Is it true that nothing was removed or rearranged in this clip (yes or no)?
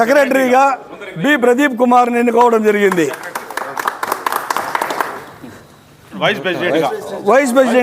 no